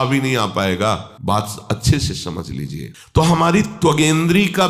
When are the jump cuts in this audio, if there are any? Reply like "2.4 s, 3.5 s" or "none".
none